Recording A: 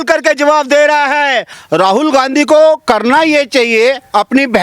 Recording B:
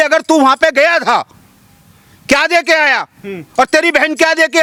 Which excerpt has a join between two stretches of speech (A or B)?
A